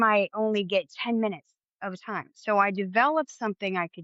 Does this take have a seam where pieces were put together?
no; 0 cuts

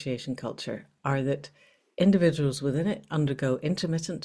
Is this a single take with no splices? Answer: yes; 0 cuts

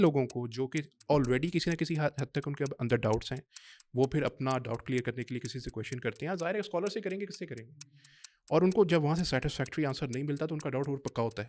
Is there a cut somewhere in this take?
no; 0 cuts

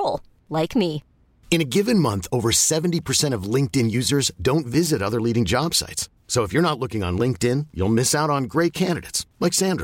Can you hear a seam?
no; 0 cuts

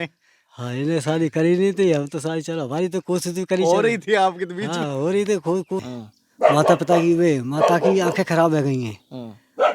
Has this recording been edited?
yes; 1 cut; at 5.8 s

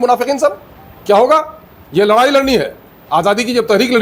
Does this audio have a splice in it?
no; 0 cuts

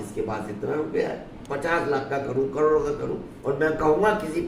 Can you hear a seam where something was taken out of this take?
yes; 2 cuts; at 1.3 s, 3.3 s

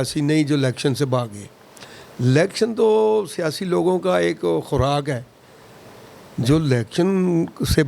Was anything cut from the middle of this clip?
no; 0 cuts

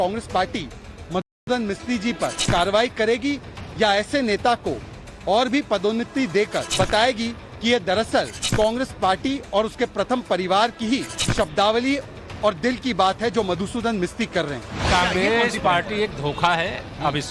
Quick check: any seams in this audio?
yes; 5 cuts; at 2.4 s, 6.6 s, 8.4 s, 11.2 s, 14.7 s

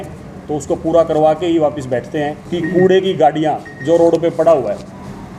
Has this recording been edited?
yes; 1 cut; at 2.4 s

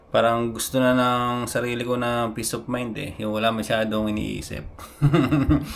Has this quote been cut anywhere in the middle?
no; 0 cuts

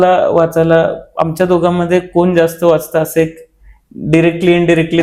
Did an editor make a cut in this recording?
no; 0 cuts

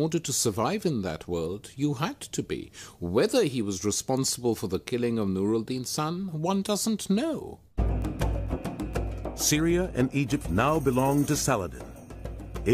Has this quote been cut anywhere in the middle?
yes; 1 cut; at 4.4 s

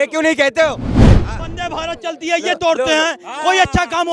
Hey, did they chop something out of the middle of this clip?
yes; 1 cut; at 1.1 s

